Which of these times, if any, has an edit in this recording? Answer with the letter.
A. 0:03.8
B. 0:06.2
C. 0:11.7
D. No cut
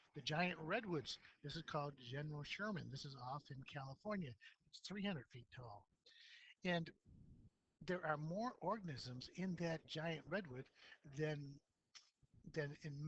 D